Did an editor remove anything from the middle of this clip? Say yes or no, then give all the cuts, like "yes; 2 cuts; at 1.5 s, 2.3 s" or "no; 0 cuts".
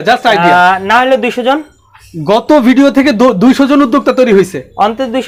no; 0 cuts